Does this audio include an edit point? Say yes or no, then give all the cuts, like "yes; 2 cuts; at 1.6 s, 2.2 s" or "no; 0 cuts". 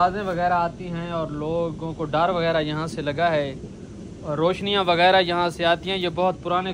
no; 0 cuts